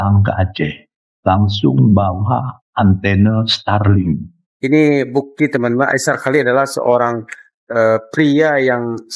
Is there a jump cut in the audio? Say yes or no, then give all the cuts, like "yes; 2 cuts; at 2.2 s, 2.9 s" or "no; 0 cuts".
yes; 1 cut; at 4.4 s